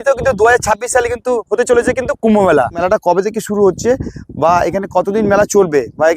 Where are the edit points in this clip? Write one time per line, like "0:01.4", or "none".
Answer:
0:02.8

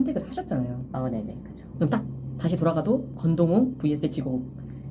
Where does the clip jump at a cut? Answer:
0:01.8

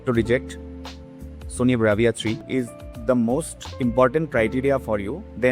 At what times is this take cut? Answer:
0:02.4

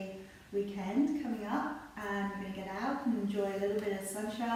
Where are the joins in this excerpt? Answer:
none

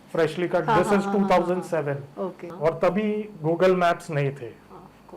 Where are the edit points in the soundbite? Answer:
0:02.4

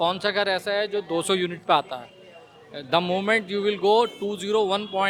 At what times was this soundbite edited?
none

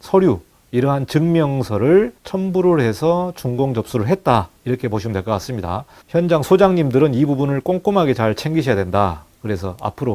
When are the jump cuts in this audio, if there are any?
0:06.0

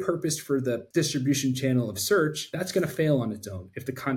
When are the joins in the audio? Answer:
0:00.8
0:02.4

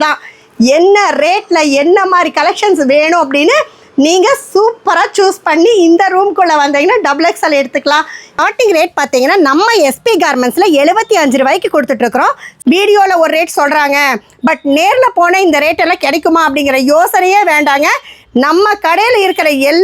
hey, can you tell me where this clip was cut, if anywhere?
0:08.3
0:12.5

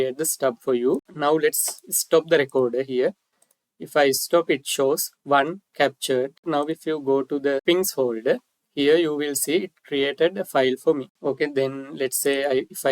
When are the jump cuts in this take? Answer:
0:01.1
0:06.5
0:07.6
0:11.1

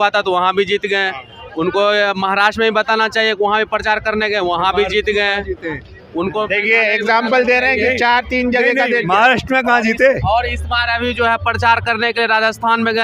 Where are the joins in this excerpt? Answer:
none

